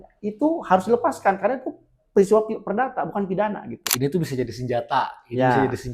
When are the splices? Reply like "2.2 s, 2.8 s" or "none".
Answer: 3.8 s